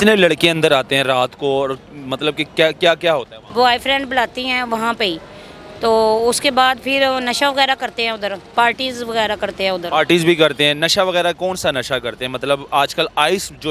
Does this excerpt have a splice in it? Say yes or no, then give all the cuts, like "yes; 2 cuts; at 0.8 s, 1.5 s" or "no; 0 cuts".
yes; 2 cuts; at 3.4 s, 8.5 s